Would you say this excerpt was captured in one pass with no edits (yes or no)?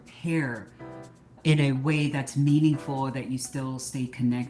no